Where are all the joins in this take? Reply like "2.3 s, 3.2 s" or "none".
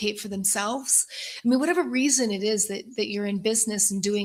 none